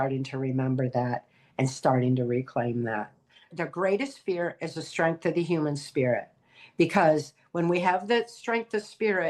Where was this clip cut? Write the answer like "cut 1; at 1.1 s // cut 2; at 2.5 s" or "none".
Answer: cut 1; at 3.6 s